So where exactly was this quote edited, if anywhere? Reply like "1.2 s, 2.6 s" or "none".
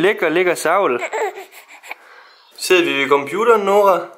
2.5 s